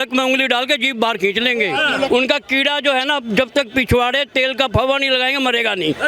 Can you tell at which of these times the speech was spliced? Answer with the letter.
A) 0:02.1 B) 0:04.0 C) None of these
A